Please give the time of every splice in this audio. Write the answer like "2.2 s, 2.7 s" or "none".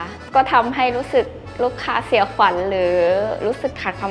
none